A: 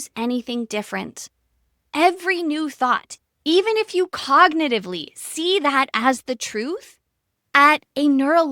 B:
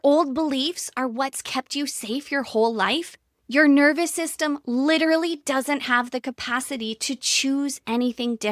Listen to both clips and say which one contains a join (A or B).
A